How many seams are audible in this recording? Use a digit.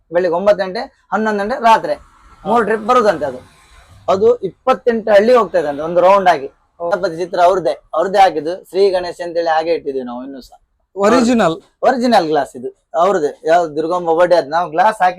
1